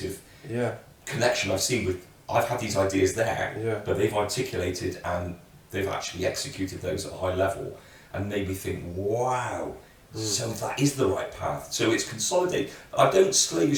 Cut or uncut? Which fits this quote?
uncut